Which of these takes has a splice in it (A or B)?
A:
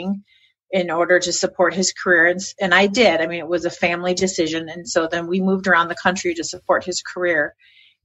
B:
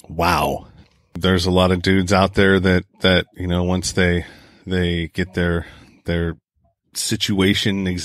B